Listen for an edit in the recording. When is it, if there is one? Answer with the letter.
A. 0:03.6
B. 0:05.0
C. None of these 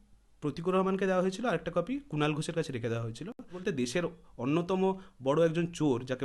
A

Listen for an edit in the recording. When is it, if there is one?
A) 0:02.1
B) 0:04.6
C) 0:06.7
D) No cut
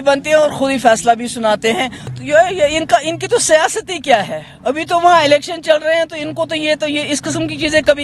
A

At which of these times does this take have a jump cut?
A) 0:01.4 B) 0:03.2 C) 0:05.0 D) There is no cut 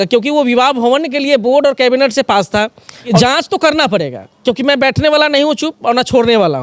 B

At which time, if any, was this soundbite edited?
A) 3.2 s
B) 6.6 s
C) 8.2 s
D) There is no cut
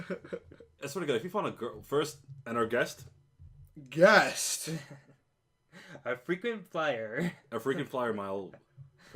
D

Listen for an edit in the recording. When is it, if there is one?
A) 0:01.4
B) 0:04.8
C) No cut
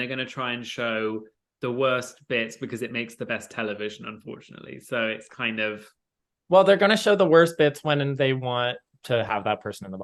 C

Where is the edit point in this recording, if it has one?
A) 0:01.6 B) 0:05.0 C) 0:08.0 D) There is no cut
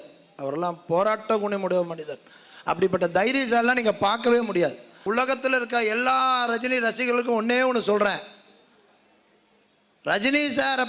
B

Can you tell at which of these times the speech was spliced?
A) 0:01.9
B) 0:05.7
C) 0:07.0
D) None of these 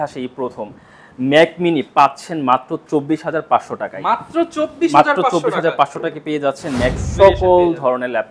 C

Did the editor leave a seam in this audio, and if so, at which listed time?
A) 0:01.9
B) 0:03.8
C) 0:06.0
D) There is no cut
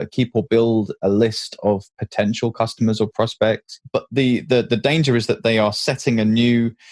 B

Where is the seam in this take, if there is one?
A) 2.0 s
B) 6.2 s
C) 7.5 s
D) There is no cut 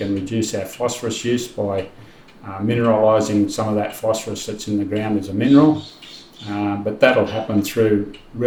D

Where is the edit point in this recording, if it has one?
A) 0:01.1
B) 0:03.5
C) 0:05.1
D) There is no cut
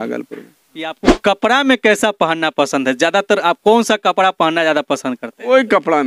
A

